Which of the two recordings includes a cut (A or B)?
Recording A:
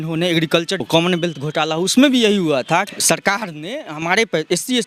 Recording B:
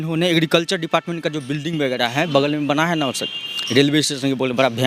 A